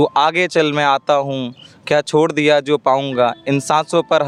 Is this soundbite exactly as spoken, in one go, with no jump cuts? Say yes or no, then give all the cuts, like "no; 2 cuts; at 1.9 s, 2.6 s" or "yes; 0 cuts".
yes; 0 cuts